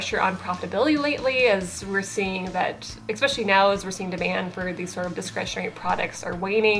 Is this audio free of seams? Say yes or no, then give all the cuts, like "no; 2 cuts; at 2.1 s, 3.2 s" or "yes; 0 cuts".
yes; 0 cuts